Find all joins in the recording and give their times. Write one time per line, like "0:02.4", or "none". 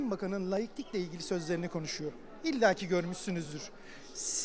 none

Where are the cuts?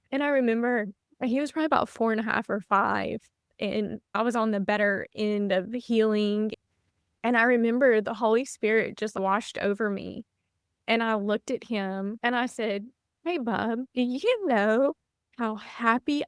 0:01.0
0:06.6
0:12.2
0:13.9

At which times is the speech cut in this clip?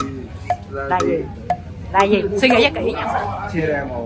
0:02.8

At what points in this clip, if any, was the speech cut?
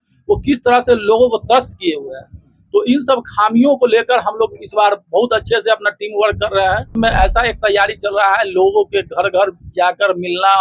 0:06.9

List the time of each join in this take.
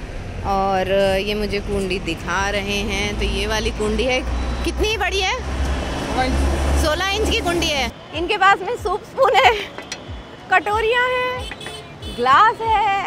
0:07.9

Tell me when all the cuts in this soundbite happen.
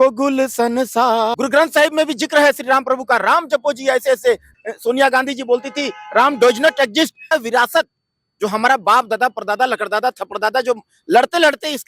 0:01.3
0:04.5
0:07.3

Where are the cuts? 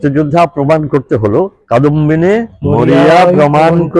0:01.6
0:02.5

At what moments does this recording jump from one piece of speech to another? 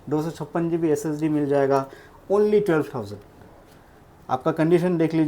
none

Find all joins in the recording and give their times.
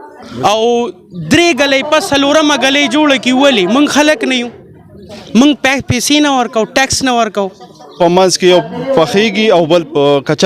0:08.0

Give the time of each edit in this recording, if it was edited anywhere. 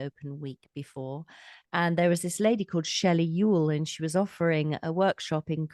0:01.5

